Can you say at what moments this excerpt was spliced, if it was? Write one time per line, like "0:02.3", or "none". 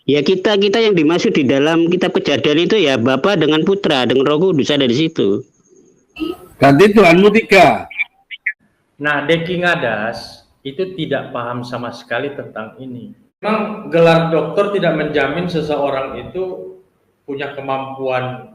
0:08.3
0:13.4

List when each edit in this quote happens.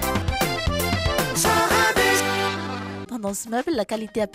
0:03.0

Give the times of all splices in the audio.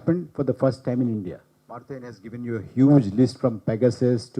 none

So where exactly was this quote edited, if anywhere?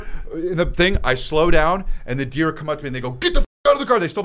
none

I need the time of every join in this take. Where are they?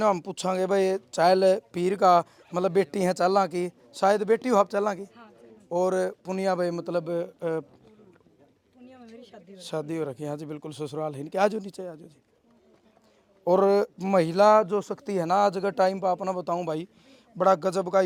none

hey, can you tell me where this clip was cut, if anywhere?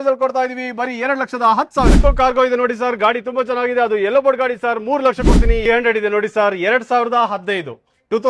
0:01.9
0:05.6

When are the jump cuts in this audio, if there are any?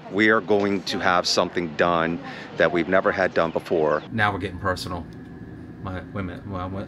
0:04.1

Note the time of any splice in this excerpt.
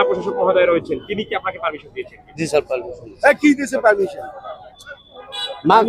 none

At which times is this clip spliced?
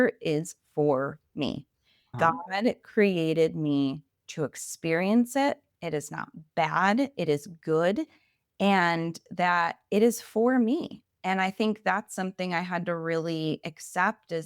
0:02.1

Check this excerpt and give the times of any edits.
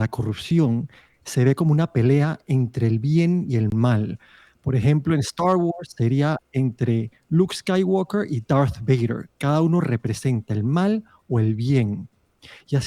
none

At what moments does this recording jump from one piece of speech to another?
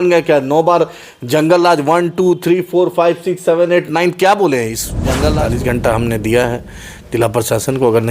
0:05.4

